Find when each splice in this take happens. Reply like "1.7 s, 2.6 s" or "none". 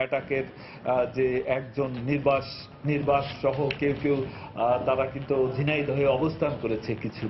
none